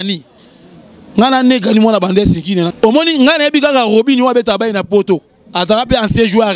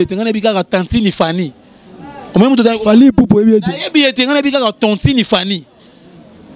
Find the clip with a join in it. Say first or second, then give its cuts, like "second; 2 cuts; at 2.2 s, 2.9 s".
first; 1 cut; at 2.7 s